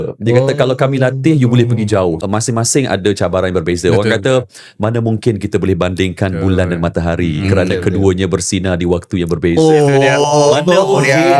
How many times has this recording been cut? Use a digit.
1